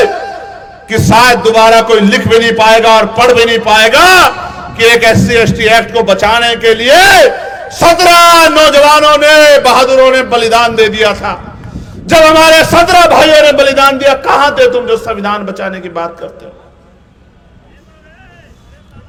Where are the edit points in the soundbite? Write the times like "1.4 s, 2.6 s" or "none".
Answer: none